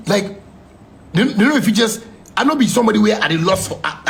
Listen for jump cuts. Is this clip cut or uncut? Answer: uncut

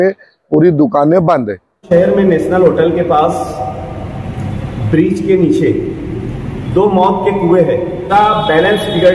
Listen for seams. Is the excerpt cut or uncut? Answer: cut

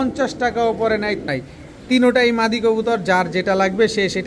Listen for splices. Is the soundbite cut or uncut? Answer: cut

